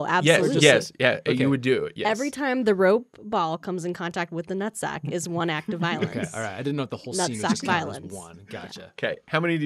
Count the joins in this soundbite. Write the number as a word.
zero